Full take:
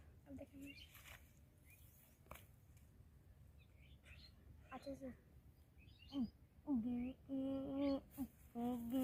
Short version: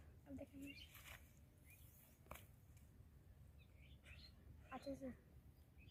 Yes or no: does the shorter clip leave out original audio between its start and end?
no